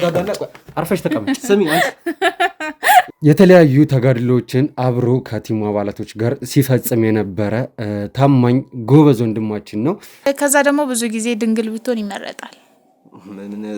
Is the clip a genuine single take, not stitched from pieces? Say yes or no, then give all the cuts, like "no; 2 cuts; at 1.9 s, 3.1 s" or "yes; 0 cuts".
no; 2 cuts; at 3.1 s, 10.3 s